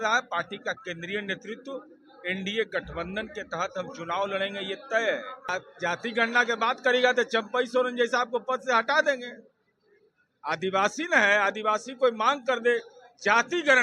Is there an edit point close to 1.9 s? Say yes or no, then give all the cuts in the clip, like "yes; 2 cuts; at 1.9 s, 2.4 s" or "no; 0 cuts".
no; 1 cut; at 5.5 s